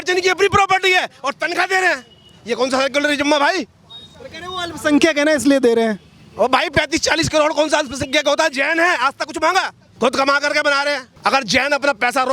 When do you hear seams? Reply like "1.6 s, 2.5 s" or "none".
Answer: 9.8 s, 11.1 s